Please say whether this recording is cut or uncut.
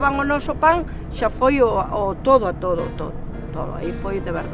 uncut